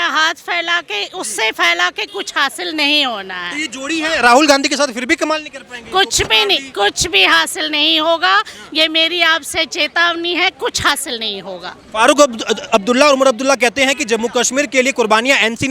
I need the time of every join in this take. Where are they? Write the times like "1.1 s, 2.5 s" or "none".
none